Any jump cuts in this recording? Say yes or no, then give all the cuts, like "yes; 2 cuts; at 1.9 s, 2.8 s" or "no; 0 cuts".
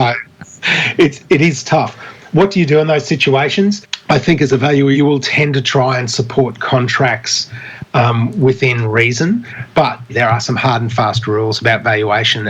yes; 3 cuts; at 3.9 s, 5.0 s, 10.1 s